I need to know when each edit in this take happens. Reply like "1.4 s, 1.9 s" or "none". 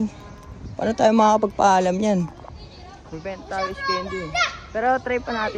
none